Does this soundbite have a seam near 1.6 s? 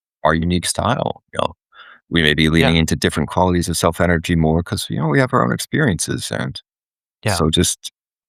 no; 0 cuts

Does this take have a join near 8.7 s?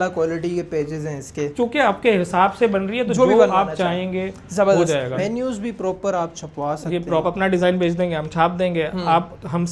no; 3 cuts; at 1.5 s, 5.2 s, 7.2 s

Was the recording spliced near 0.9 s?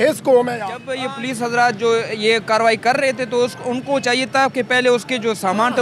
yes; 1 cut; at 0.9 s

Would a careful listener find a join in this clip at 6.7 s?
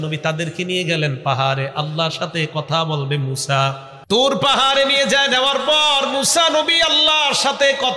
no; 1 cut; at 3.9 s

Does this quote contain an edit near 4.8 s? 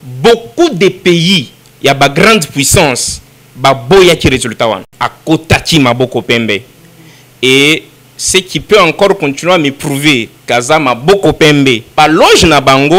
yes; 2 cuts; at 4.8 s, 11.9 s

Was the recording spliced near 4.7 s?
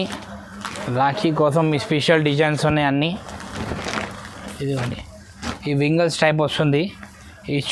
no; 0 cuts

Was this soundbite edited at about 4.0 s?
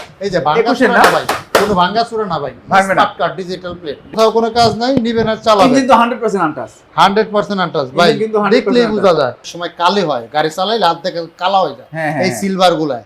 yes; 2 cuts; at 4.0 s, 9.3 s

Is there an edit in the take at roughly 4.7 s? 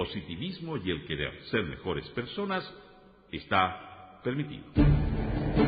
yes; 1 cut; at 4.7 s

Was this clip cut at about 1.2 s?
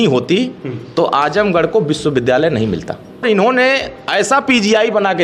no; 1 cut; at 3.2 s

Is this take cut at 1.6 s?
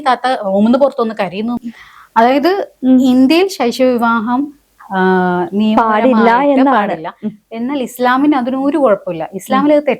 yes; 1 cut; at 1.6 s

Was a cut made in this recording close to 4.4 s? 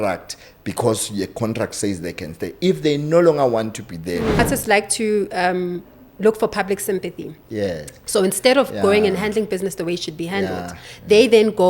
yes; 1 cut; at 4.4 s

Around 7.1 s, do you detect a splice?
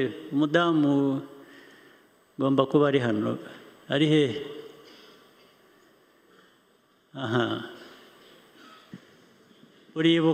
no; 1 cut; at 8.9 s

